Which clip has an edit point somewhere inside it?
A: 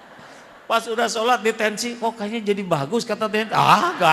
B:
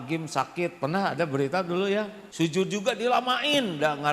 B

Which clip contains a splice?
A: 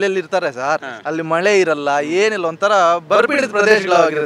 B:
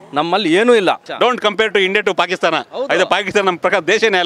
B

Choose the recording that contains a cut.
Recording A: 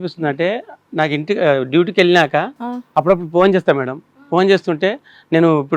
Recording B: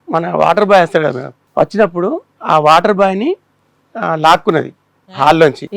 B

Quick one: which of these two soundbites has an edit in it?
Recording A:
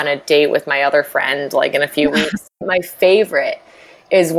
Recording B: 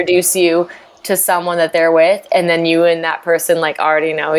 A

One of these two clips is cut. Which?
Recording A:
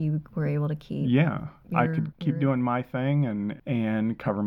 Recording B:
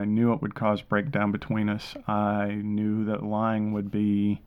A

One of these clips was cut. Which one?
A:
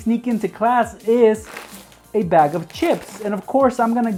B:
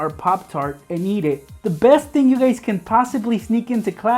B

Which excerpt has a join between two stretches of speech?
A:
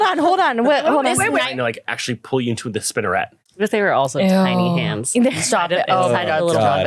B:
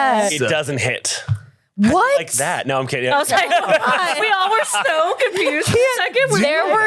A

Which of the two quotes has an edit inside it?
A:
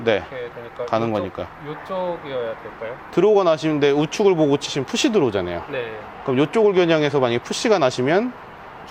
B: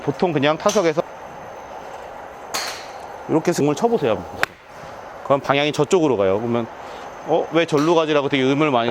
B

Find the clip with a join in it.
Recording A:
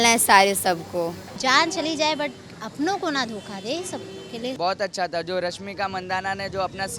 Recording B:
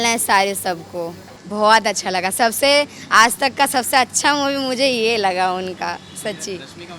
A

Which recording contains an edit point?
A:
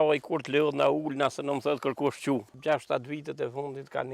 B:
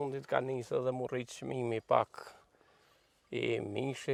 A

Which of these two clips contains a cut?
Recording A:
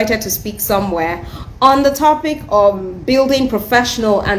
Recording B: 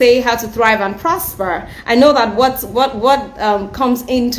A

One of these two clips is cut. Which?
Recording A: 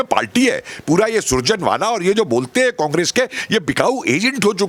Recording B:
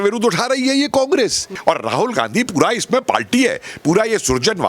B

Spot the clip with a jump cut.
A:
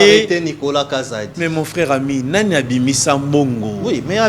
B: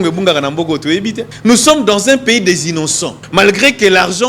B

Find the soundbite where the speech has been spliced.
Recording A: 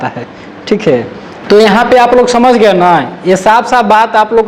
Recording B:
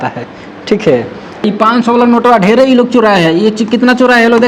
B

